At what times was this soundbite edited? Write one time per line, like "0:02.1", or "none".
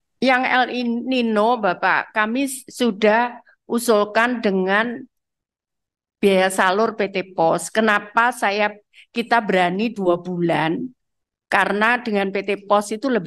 none

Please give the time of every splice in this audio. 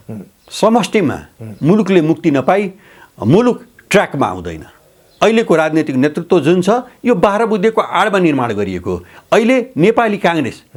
none

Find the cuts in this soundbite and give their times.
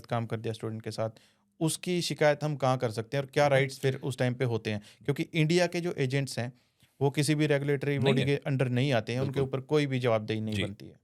none

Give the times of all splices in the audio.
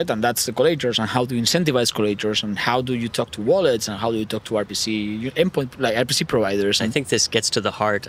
0:06.9

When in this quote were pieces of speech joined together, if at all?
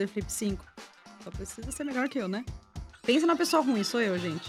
none

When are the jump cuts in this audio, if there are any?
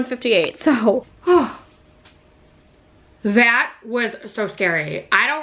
0:01.2

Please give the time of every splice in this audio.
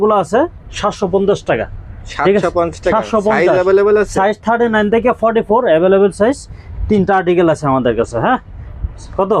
none

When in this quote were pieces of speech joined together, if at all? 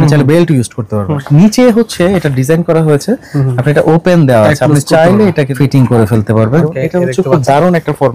0:01.2
0:05.5
0:06.6

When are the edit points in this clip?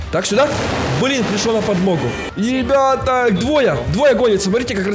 0:02.3

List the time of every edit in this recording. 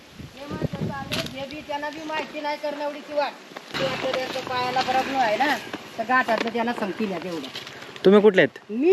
0:03.7

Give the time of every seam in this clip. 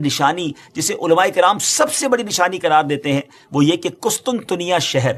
none

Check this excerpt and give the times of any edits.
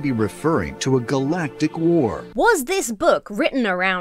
0:02.2

